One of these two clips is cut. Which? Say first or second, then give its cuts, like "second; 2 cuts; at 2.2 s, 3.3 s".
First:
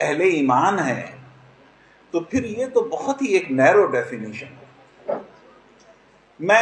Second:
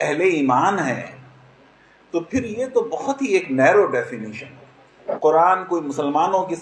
second; 1 cut; at 5.1 s